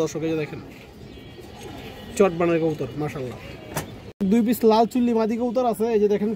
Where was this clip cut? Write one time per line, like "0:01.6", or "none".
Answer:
0:04.3